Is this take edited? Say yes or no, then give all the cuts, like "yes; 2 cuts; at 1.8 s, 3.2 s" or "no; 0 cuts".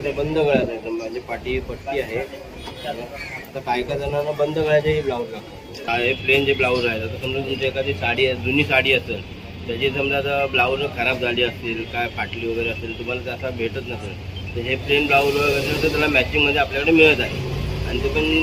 yes; 1 cut; at 5.8 s